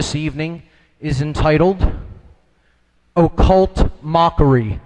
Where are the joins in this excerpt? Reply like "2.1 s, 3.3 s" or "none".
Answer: 1.3 s